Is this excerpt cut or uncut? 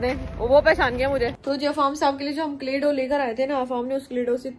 uncut